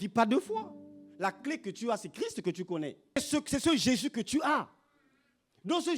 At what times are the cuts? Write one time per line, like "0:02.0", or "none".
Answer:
0:03.2